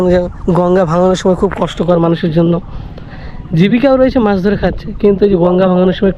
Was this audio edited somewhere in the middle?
no; 0 cuts

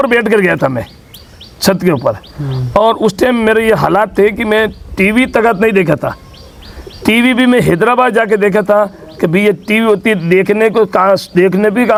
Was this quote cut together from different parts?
no; 0 cuts

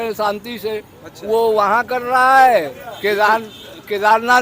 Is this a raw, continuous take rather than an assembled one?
no; 1 cut; at 2.8 s

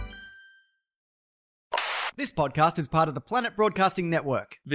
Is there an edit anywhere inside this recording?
yes; 2 cuts; at 1.2 s, 2.1 s

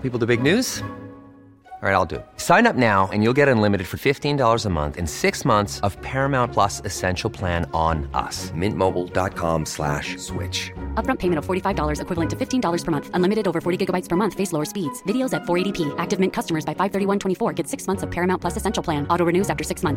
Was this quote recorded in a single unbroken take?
yes; 0 cuts

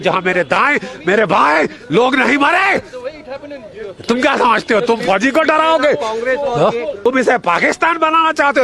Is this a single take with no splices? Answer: no; 1 cut; at 7.1 s

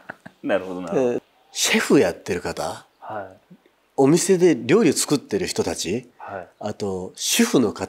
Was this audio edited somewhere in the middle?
yes; 1 cut; at 1.2 s

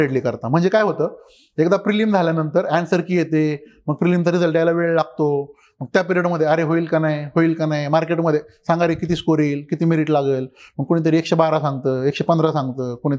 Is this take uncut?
yes; 0 cuts

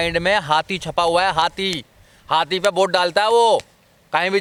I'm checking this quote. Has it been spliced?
no; 0 cuts

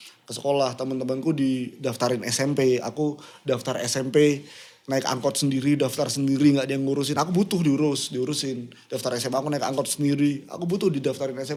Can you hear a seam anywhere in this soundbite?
no; 0 cuts

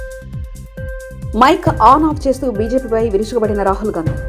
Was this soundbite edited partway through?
yes; 1 cut; at 0.9 s

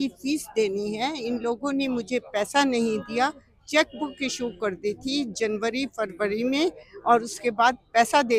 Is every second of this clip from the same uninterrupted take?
yes; 0 cuts

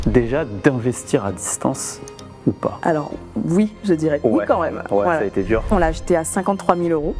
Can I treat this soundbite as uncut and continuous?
no; 1 cut; at 5.7 s

